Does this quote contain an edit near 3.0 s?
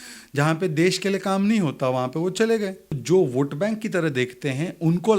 yes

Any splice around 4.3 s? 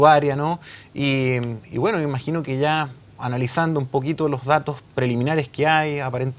no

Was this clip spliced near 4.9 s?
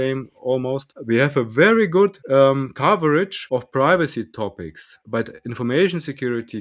yes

